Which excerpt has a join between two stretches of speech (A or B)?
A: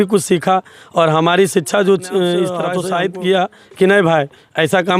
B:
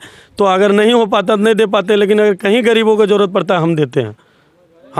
A